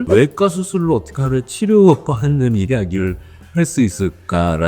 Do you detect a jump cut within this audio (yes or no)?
no